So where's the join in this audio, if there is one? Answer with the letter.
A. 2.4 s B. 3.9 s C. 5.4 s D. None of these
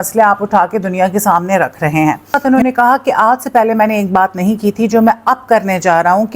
A